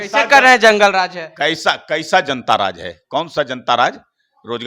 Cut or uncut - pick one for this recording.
uncut